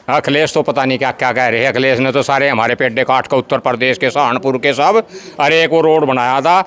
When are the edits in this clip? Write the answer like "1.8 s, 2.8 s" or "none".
none